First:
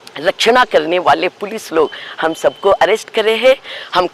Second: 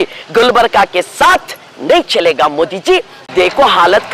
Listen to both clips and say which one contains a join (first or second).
second